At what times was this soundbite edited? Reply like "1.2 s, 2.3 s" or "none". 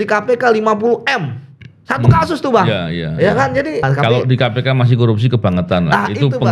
3.8 s